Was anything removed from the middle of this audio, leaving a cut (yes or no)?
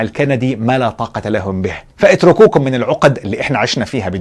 yes